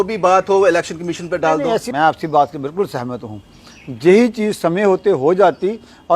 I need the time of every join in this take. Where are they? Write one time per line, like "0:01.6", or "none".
0:01.8